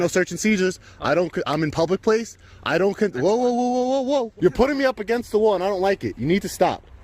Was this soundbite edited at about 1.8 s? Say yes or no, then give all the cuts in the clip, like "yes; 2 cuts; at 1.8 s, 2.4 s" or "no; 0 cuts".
no; 1 cut; at 4.3 s